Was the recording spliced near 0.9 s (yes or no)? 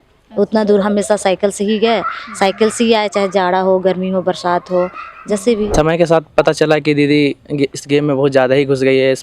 no